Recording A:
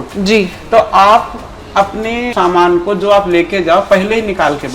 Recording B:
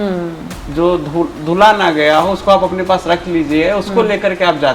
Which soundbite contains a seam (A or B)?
A